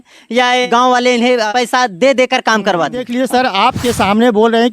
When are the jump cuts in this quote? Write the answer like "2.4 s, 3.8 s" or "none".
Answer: 3.1 s